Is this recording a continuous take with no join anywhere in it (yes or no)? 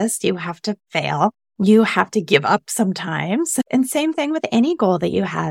no